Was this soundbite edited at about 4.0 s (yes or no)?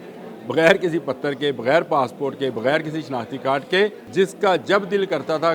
yes